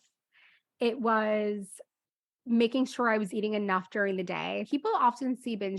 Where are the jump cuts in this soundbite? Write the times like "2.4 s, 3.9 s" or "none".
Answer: 4.7 s